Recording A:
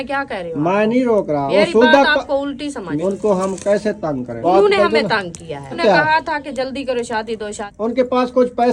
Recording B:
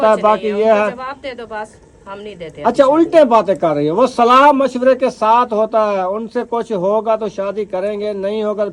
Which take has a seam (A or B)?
A